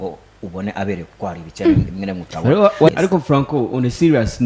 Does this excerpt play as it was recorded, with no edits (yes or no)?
no